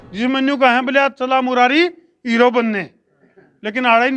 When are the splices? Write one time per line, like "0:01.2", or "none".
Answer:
none